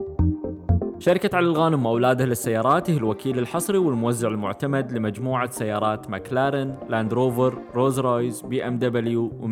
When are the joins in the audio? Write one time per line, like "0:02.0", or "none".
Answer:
0:01.0